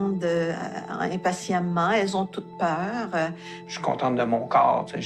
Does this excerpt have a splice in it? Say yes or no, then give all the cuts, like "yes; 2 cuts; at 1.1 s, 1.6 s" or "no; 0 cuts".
yes; 1 cut; at 3.6 s